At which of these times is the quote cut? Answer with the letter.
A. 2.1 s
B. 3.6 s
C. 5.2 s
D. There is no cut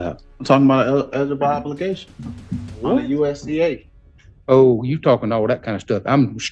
D